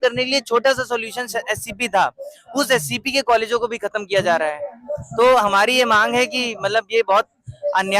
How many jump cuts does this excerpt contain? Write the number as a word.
zero